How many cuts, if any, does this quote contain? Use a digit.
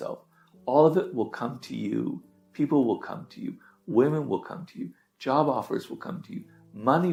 0